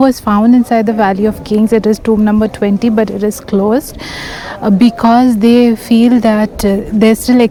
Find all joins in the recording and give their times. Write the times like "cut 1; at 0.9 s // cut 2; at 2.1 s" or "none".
none